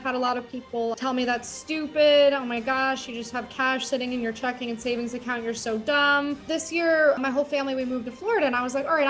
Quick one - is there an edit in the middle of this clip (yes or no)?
yes